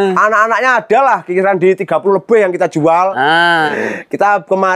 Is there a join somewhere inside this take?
yes; 1 cut; at 3.7 s

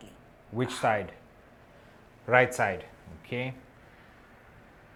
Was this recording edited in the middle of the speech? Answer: no; 0 cuts

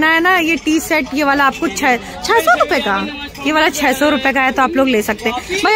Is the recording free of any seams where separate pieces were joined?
yes; 0 cuts

